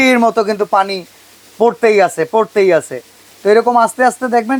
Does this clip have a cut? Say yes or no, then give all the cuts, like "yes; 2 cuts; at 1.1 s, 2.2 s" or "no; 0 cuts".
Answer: no; 0 cuts